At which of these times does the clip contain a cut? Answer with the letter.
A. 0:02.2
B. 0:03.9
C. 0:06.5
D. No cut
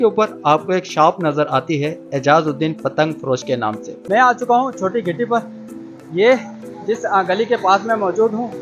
B